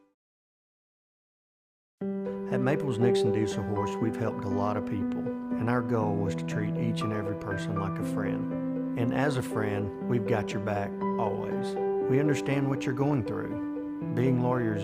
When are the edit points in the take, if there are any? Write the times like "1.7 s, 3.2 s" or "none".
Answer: 10.2 s